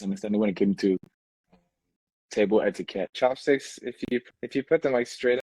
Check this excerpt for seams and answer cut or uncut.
cut